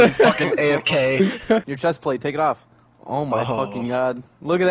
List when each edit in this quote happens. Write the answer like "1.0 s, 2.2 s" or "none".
1.7 s